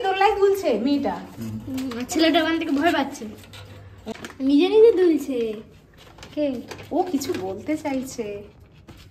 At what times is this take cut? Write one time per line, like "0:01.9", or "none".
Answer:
none